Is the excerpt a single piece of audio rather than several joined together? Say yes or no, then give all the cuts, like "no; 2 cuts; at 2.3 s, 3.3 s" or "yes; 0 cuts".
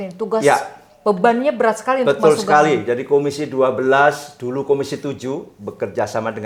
yes; 0 cuts